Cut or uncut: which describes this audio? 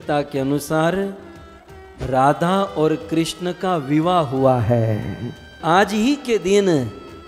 cut